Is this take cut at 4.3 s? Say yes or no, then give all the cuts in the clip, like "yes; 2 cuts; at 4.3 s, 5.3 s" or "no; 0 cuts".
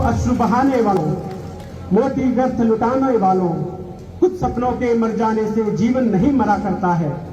no; 1 cut; at 0.9 s